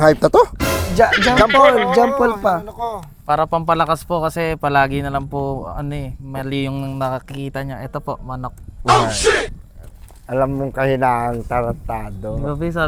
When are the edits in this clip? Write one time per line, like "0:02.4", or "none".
none

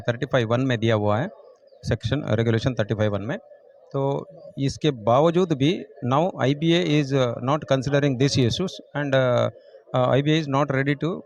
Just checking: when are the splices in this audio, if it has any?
none

